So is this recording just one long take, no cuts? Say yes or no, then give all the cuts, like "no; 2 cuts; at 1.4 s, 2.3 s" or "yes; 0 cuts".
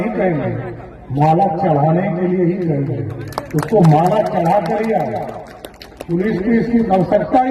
yes; 0 cuts